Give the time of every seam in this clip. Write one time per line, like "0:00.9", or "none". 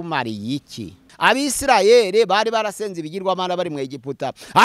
0:01.0